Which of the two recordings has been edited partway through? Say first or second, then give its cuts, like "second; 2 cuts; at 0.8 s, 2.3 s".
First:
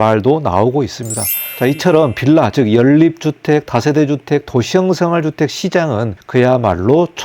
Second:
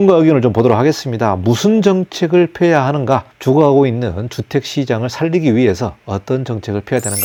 first; 2 cuts; at 1.5 s, 6.2 s